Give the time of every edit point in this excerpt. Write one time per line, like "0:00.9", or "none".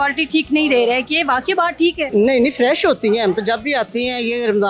none